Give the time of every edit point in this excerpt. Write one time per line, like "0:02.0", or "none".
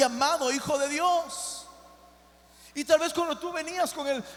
none